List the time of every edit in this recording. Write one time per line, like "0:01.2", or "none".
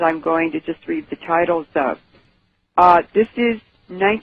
0:02.7